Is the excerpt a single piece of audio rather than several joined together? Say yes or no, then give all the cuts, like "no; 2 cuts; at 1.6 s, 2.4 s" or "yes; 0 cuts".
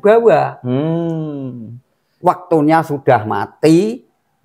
yes; 0 cuts